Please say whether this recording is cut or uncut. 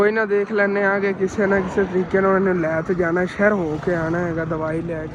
uncut